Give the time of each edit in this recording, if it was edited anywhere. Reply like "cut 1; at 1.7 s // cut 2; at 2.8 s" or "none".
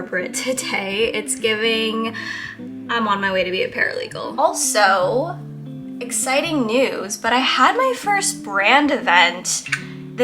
cut 1; at 4.2 s